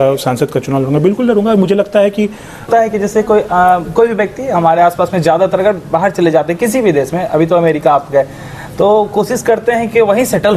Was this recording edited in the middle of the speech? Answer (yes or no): yes